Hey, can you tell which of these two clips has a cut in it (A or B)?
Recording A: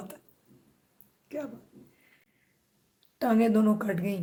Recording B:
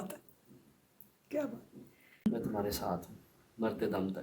B